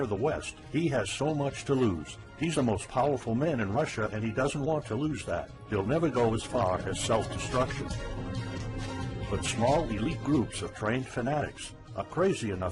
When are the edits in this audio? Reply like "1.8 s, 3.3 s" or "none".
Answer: none